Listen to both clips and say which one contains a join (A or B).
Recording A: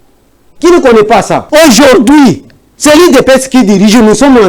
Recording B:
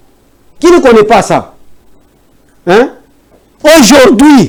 A